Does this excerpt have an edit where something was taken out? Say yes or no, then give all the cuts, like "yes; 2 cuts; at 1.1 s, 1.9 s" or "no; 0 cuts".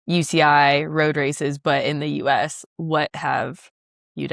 no; 0 cuts